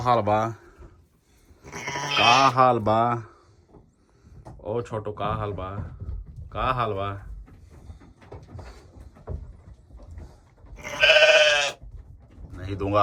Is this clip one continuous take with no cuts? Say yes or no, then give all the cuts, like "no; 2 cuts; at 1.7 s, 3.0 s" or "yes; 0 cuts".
yes; 0 cuts